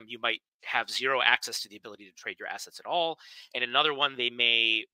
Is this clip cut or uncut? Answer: uncut